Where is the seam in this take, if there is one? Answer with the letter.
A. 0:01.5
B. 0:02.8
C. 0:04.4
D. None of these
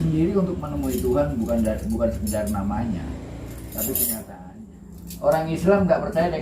C